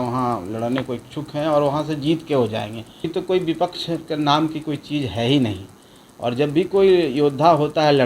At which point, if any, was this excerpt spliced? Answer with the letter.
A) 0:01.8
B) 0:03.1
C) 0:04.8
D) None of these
B